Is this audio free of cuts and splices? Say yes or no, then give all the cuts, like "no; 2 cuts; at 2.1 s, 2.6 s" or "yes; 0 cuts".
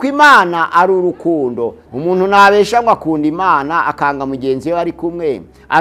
no; 1 cut; at 1.8 s